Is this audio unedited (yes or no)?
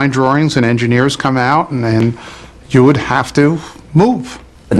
no